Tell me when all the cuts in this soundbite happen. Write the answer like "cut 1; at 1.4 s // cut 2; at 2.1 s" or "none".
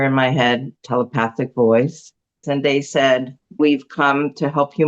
cut 1; at 2.4 s // cut 2; at 3.6 s